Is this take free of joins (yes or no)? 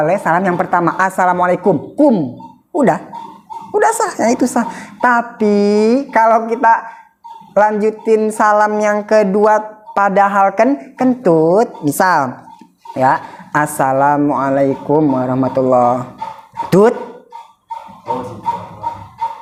yes